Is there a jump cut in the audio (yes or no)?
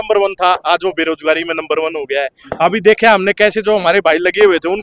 no